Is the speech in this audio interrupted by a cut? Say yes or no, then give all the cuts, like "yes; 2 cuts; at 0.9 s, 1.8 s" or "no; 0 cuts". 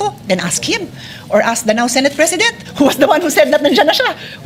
no; 0 cuts